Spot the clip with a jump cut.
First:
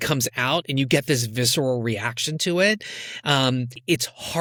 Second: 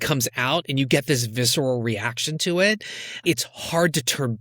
second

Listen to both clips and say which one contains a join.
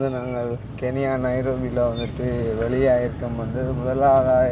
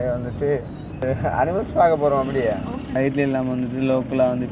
second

